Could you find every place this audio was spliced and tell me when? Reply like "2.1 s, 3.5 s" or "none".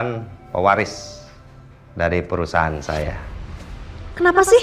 3.4 s